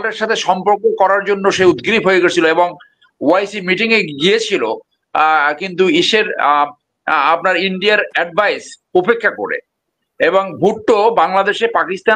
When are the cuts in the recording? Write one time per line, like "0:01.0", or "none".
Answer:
none